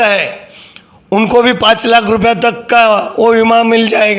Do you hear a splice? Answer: no; 0 cuts

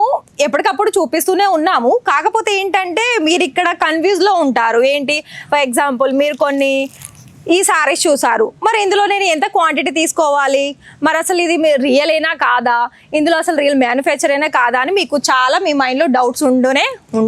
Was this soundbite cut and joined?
no; 0 cuts

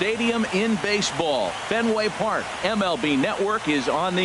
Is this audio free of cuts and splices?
yes; 0 cuts

